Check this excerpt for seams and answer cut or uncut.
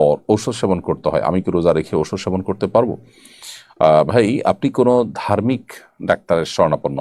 uncut